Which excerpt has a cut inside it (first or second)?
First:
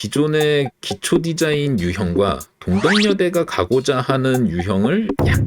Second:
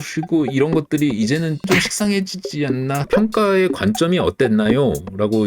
second